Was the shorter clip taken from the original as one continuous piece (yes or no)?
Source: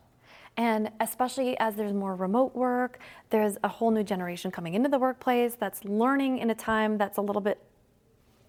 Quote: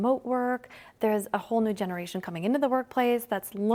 yes